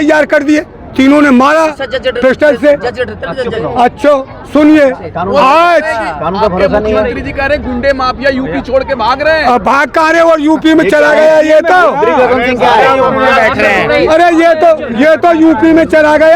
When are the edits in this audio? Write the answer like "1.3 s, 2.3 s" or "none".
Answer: none